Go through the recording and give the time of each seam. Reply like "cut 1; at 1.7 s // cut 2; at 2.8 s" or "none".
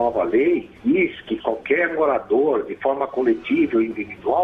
cut 1; at 1.1 s